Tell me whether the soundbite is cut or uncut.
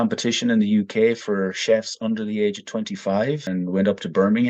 cut